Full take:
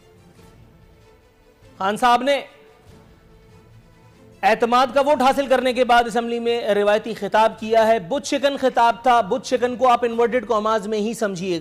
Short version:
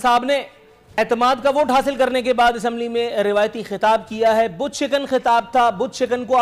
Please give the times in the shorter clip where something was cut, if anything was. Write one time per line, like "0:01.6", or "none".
0:01.0